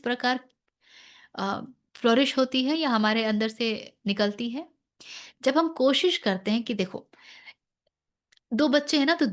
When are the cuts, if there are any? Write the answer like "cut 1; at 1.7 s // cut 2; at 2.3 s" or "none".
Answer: none